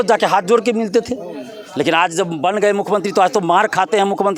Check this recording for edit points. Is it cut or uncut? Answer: uncut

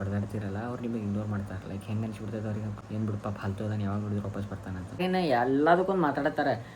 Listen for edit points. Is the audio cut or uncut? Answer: cut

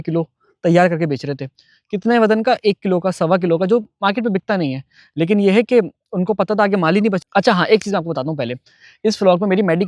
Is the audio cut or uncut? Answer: cut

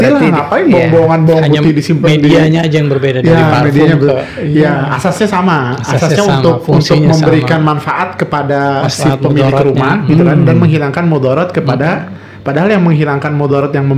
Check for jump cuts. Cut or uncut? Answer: uncut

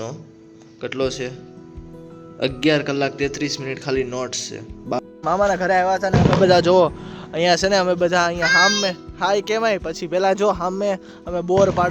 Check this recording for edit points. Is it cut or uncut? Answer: cut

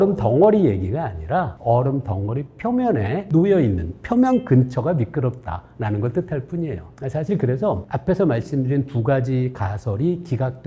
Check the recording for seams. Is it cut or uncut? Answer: uncut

